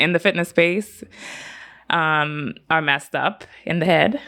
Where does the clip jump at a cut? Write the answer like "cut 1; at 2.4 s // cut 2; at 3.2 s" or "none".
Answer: none